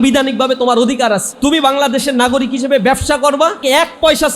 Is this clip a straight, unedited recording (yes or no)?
no